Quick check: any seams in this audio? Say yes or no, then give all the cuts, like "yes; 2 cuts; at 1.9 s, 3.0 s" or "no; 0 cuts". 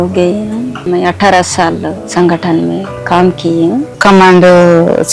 yes; 3 cuts; at 0.9 s, 2.0 s, 3.9 s